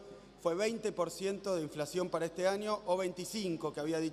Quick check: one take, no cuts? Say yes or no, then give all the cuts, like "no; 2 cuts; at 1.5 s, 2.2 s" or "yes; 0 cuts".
yes; 0 cuts